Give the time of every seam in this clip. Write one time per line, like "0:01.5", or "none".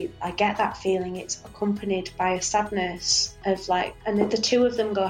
0:04.0